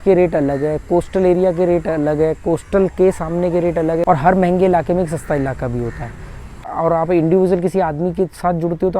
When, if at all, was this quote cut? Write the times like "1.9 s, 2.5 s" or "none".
4.0 s, 6.6 s